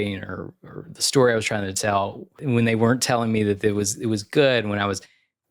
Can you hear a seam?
yes; 1 cut; at 2.4 s

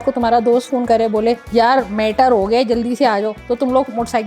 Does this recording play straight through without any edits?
no; 1 cut; at 1.4 s

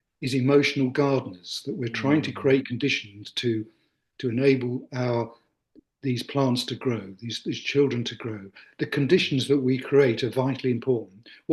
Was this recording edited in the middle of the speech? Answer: no; 0 cuts

